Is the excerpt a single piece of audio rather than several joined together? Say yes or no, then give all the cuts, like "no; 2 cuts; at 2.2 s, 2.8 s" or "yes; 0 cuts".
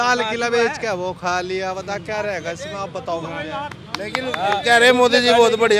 yes; 0 cuts